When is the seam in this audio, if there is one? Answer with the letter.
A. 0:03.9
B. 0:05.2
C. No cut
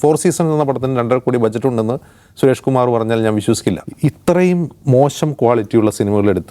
A